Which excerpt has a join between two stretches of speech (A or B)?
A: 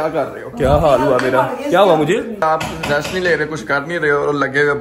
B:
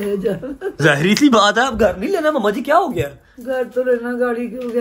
A